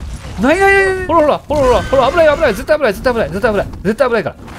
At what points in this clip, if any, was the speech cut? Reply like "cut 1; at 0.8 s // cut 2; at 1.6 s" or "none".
cut 1; at 1.0 s